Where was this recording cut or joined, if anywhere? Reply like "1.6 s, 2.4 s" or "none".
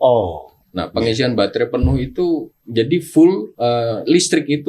2.6 s, 3.5 s